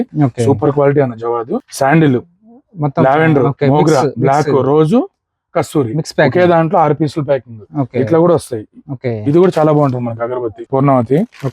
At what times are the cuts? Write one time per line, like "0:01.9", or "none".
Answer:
0:01.6
0:10.6